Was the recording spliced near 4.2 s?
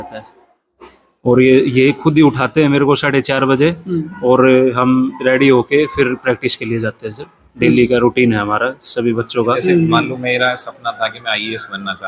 no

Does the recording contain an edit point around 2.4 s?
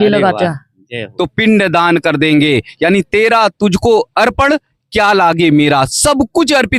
no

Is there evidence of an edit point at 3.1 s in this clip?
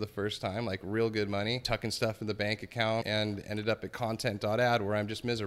yes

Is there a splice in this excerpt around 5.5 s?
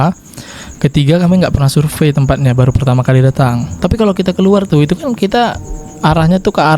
no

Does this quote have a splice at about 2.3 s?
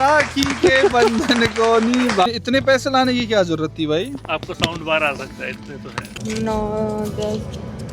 yes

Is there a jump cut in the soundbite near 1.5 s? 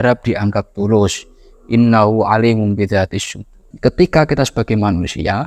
no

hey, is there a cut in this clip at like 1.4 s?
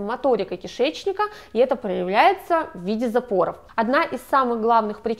no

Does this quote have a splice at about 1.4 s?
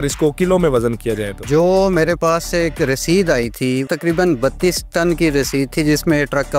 yes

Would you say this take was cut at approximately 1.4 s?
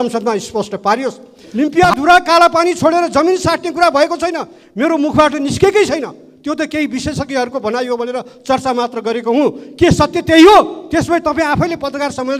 yes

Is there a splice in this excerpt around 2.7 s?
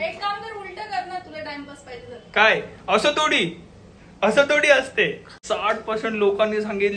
yes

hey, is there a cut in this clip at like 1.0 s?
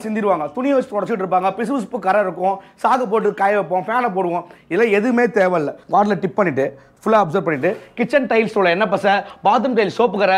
no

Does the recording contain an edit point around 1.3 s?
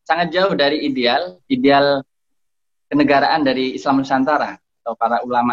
yes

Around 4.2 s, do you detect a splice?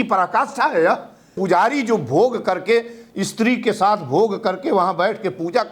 no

